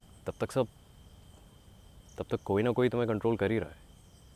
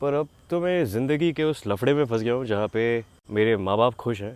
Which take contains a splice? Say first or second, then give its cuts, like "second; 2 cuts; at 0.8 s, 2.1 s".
second; 1 cut; at 3.2 s